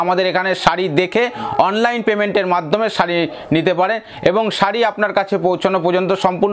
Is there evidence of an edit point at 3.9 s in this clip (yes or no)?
no